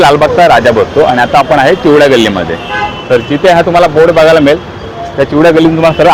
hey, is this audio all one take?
yes; 0 cuts

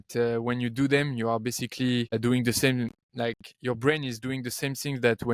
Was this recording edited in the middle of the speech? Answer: yes; 2 cuts; at 2.1 s, 3.0 s

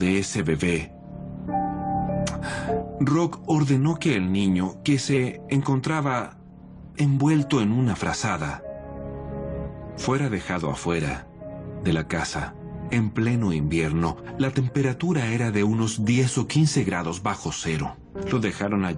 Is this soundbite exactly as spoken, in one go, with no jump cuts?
yes; 0 cuts

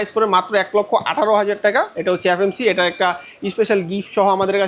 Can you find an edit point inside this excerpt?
no; 0 cuts

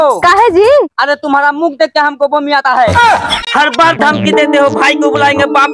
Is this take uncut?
no; 1 cut; at 3.3 s

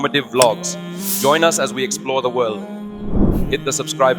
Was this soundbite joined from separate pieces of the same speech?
no; 0 cuts

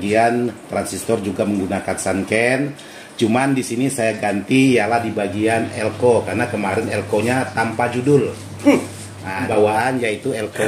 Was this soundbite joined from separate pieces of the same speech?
yes; 1 cut; at 9.5 s

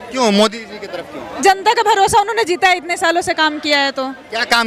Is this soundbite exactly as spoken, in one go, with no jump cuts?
yes; 0 cuts

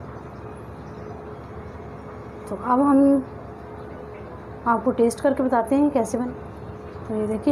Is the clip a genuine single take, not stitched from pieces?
no; 1 cut; at 6.2 s

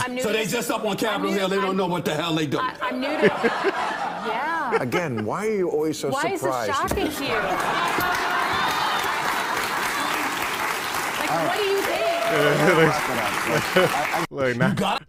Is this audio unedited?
yes; 0 cuts

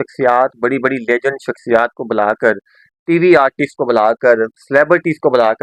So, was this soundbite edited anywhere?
no; 0 cuts

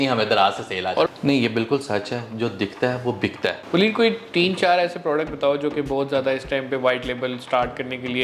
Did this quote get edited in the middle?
yes; 2 cuts; at 1.1 s, 3.6 s

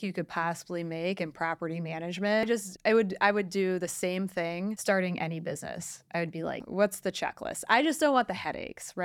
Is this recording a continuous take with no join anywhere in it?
no; 2 cuts; at 2.4 s, 6.6 s

